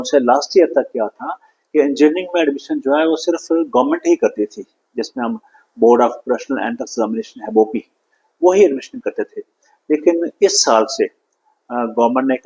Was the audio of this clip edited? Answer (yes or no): no